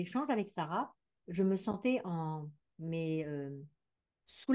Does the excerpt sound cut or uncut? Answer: uncut